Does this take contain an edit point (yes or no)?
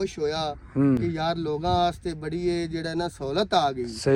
no